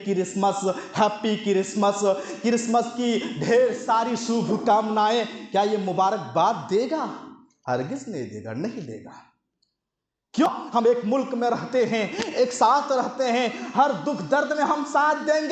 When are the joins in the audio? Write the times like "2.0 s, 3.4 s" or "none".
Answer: 10.5 s

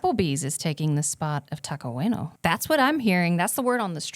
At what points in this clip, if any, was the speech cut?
2.3 s

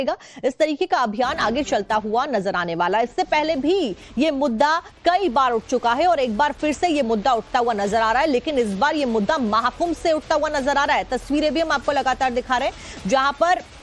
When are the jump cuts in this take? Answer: none

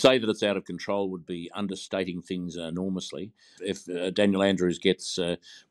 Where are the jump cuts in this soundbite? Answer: 3.6 s

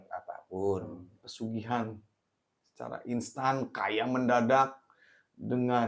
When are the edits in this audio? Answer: 1.2 s

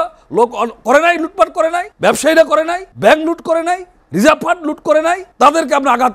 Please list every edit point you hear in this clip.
1.9 s, 2.8 s, 4.0 s, 5.3 s

